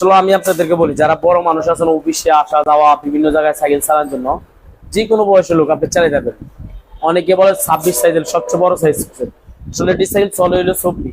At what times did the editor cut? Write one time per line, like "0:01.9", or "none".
none